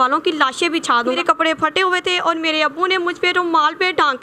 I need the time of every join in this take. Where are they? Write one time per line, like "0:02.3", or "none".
0:01.2